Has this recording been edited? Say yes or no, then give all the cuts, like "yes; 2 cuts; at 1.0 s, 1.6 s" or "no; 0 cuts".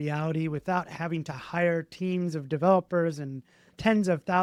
no; 0 cuts